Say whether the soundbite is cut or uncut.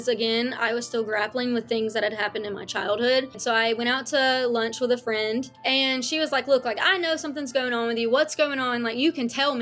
cut